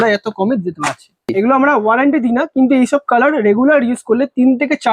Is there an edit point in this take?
yes; 1 cut; at 1.3 s

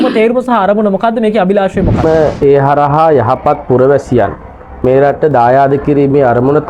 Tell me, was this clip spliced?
yes; 1 cut; at 2.0 s

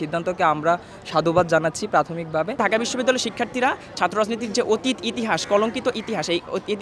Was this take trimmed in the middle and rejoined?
yes; 1 cut; at 2.6 s

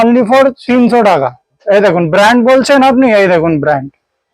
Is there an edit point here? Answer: yes; 1 cut; at 1.6 s

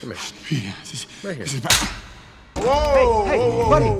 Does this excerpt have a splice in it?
yes; 1 cut; at 2.5 s

